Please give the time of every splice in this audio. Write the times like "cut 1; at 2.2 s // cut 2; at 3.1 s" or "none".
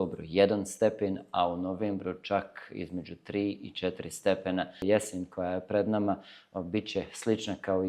cut 1; at 4.8 s